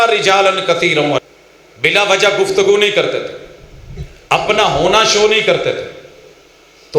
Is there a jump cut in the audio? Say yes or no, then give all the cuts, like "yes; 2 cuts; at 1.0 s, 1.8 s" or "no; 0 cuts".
yes; 1 cut; at 1.3 s